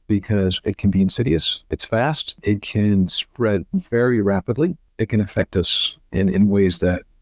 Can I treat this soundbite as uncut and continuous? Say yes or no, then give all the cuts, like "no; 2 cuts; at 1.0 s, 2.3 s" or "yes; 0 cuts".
no; 2 cuts; at 2.4 s, 4.8 s